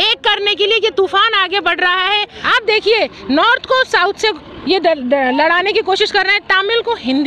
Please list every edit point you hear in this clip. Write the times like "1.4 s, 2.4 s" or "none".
2.4 s